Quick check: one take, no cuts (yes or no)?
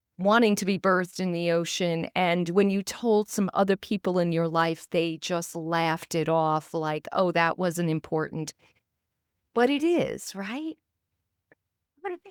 yes